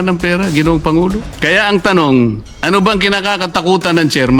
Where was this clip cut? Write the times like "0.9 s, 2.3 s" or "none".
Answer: 1.3 s, 2.5 s